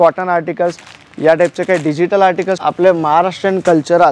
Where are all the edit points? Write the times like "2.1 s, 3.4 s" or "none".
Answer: 2.6 s